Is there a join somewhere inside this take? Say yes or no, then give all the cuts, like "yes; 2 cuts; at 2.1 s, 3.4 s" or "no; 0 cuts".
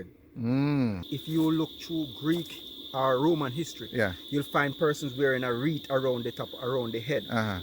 yes; 1 cut; at 1.1 s